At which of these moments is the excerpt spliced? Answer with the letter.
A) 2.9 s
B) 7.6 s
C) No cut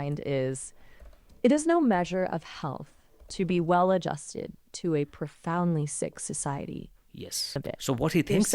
B